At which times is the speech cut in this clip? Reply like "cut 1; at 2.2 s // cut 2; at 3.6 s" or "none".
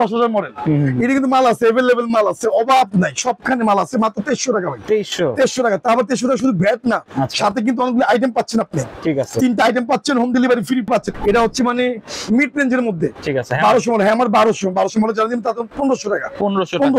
cut 1; at 11.0 s

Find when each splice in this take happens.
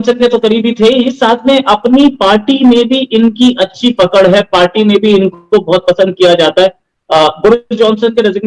none

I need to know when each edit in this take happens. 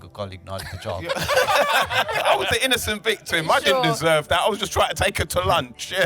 cut 1; at 2.2 s

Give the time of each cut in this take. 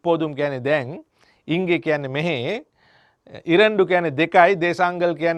none

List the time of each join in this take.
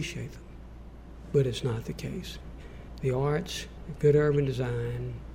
cut 1; at 2.5 s

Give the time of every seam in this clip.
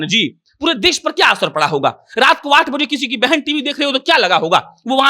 none

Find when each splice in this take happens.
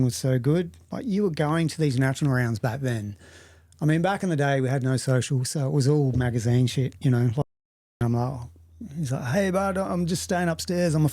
cut 1; at 8.0 s

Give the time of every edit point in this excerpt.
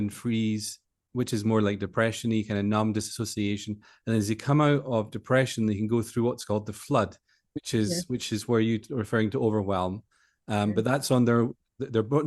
cut 1; at 1.0 s

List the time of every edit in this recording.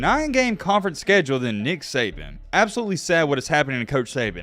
cut 1; at 2.3 s

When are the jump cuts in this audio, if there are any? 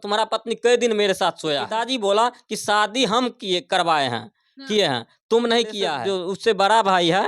cut 1; at 1.7 s // cut 2; at 6.0 s

